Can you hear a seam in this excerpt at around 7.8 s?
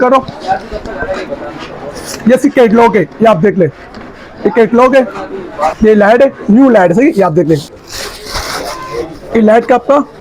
yes; 2 cuts; at 5.7 s, 7.8 s

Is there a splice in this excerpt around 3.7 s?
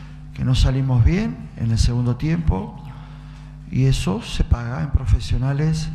no; 0 cuts

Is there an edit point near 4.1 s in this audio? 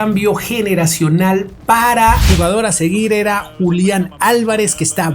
no; 1 cut; at 2.2 s

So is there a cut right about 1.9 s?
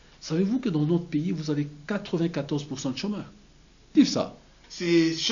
no; 1 cut; at 3.9 s

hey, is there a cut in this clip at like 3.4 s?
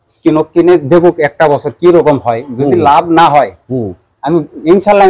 no; 0 cuts

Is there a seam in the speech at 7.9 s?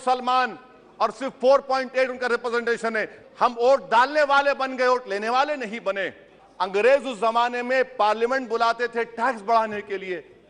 no; 2 cuts; at 3.2 s, 6.4 s

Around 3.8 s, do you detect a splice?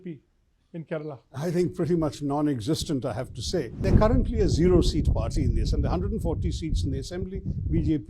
yes; 1 cut; at 3.8 s

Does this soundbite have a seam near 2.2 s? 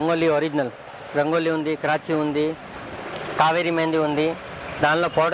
no; 0 cuts

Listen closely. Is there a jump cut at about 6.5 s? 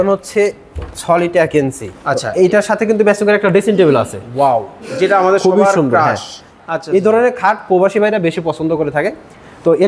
yes; 2 cuts; at 1.9 s, 6.5 s

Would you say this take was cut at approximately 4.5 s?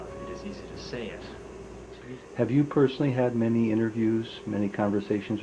no; 1 cut; at 2.0 s

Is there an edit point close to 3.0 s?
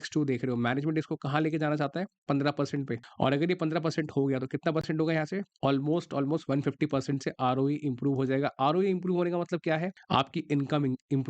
yes; 3 cuts; at 3.0 s, 5.5 s, 10.0 s

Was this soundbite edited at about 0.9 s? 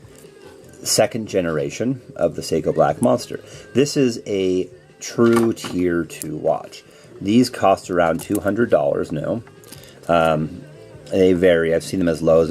yes; 1 cut; at 0.9 s

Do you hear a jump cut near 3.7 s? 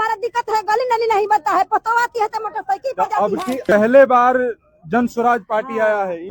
yes; 1 cut; at 3.7 s

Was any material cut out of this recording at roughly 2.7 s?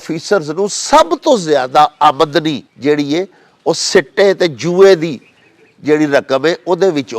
yes; 1 cut; at 2.7 s

